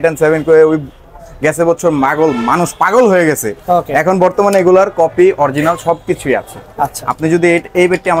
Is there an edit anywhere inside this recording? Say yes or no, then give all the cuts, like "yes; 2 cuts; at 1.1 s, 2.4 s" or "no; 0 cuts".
no; 0 cuts